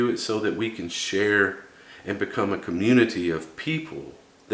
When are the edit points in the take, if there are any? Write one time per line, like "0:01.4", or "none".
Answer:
none